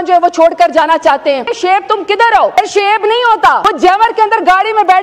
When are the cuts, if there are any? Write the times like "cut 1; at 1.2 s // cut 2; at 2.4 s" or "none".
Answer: cut 1; at 1.5 s // cut 2; at 2.6 s // cut 3; at 3.6 s